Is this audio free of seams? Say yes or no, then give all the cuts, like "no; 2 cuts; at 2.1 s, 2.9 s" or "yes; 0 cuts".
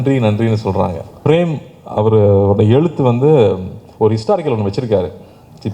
no; 1 cut; at 1.2 s